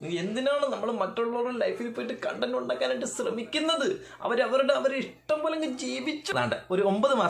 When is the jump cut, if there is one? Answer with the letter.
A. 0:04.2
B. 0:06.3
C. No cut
B